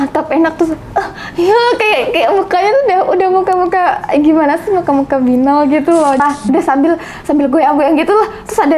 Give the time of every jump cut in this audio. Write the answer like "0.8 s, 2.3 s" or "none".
6.2 s